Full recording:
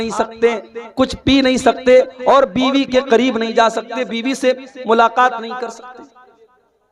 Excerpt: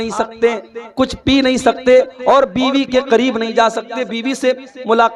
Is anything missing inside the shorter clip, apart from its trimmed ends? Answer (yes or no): no